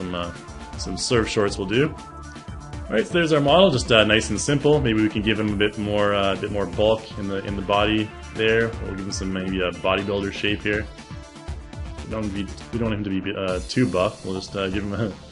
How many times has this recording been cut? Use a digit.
1